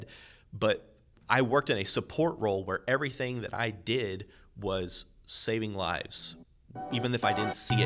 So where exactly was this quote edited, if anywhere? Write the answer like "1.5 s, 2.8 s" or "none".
none